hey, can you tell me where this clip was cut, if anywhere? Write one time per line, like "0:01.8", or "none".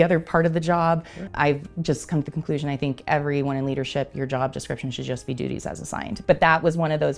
0:06.1